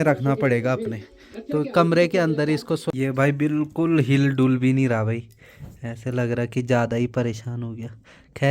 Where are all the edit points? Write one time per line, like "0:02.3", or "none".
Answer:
0:02.9